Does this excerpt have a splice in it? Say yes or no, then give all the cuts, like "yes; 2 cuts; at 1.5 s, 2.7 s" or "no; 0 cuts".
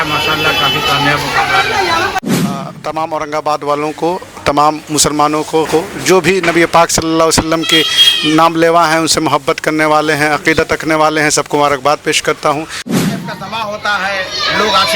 yes; 3 cuts; at 2.2 s, 5.7 s, 12.9 s